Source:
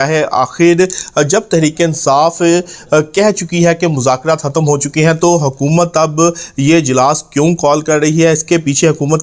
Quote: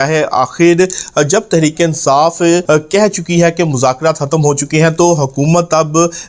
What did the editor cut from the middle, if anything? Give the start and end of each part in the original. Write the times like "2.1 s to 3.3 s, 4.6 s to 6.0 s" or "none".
2.6 s to 2.9 s